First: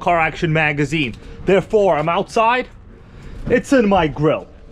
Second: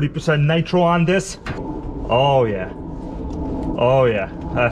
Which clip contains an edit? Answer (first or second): second